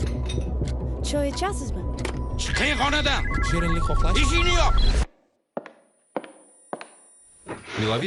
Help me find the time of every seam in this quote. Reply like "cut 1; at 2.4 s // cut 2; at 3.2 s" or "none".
none